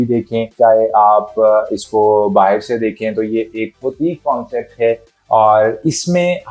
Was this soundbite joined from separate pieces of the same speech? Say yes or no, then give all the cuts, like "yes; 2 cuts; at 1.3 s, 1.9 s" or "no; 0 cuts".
no; 0 cuts